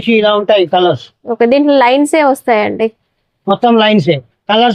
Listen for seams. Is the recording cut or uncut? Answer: uncut